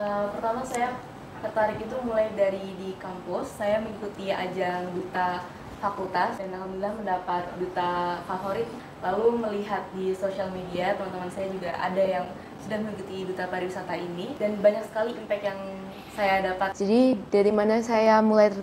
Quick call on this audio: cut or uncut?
cut